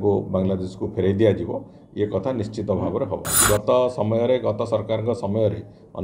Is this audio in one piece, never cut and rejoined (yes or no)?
no